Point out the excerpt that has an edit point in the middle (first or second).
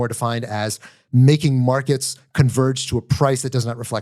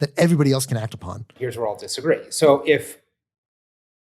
second